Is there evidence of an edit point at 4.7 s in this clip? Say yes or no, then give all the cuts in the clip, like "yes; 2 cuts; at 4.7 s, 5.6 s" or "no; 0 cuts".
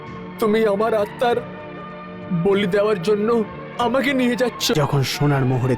yes; 1 cut; at 4.7 s